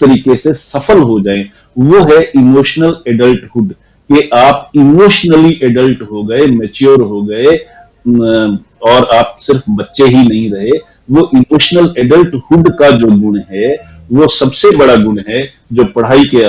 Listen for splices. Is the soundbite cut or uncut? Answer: uncut